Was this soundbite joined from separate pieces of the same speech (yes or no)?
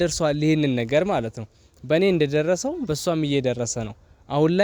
no